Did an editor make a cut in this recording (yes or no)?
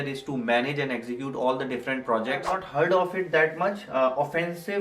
yes